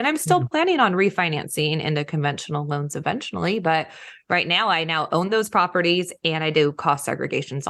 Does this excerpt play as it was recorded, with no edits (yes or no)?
yes